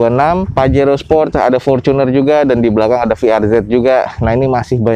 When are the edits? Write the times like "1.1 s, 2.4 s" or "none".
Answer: none